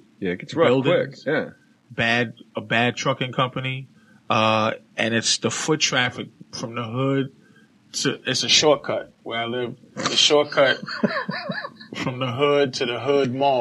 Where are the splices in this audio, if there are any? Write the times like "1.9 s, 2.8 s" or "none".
7.9 s